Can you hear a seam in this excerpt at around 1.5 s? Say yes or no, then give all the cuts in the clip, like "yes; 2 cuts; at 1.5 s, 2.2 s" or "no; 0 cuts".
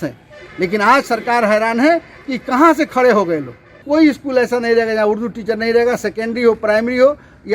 no; 1 cut; at 3.8 s